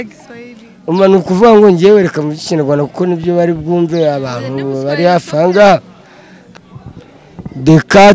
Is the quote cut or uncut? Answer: cut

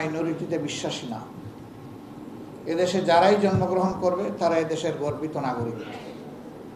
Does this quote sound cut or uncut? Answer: uncut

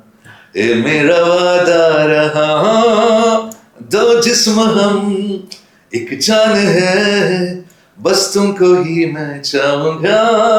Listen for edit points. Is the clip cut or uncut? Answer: uncut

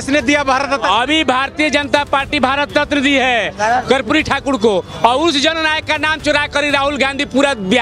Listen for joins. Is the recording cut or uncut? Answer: uncut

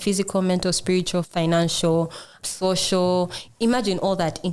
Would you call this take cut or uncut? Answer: uncut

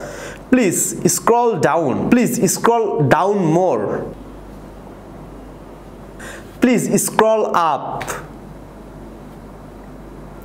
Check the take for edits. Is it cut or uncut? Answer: cut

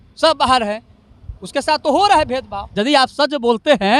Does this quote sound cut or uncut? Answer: cut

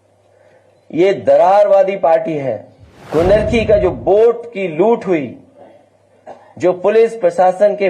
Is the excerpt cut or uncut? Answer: cut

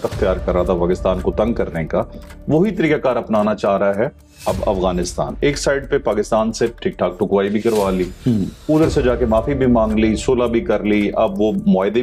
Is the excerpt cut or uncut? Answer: uncut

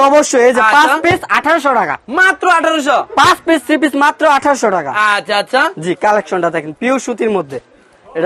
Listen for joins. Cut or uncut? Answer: uncut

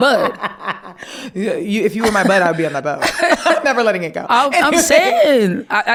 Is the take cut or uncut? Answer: uncut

